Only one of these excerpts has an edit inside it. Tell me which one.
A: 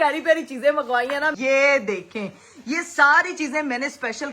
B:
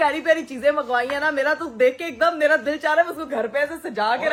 A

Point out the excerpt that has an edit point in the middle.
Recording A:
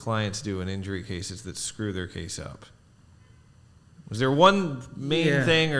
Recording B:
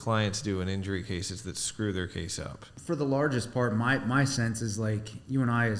B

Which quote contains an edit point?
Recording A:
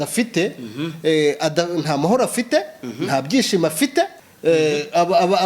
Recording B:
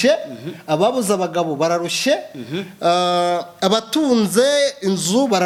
A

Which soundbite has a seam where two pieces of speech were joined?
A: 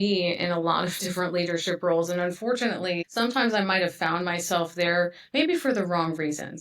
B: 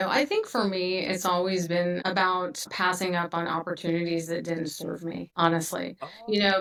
A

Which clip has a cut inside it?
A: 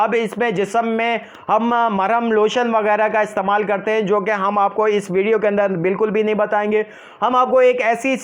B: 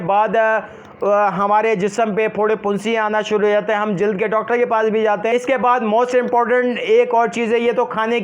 B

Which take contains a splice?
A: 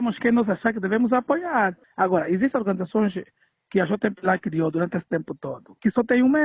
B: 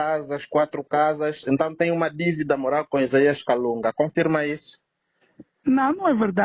A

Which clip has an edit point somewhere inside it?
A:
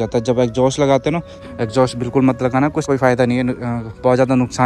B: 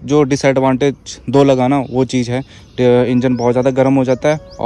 A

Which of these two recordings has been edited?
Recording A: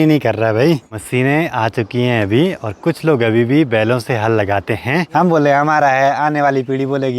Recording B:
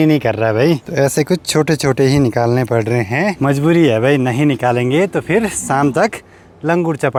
A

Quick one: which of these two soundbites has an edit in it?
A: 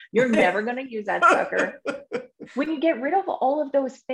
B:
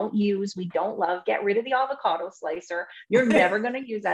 A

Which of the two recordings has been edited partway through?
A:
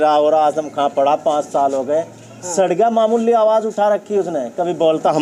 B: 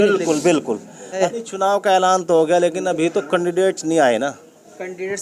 B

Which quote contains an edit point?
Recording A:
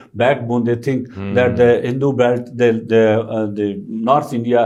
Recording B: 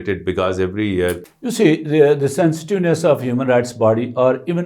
B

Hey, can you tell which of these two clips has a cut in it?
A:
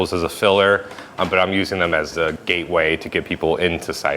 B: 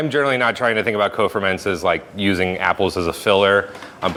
A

